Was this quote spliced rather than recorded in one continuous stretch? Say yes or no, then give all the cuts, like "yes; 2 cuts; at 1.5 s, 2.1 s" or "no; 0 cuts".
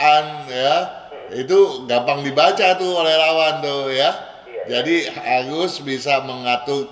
no; 0 cuts